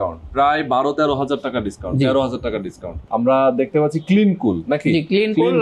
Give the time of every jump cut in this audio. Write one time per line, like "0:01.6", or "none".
0:02.9